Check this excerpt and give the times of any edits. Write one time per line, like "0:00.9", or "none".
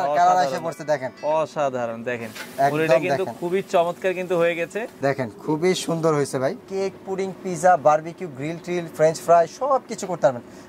0:04.8
0:06.6